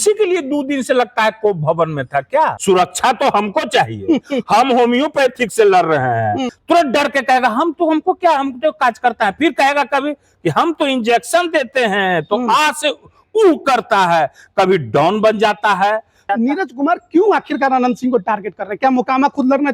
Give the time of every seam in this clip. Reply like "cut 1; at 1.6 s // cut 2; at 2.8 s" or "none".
cut 1; at 2.6 s // cut 2; at 6.5 s // cut 3; at 16.3 s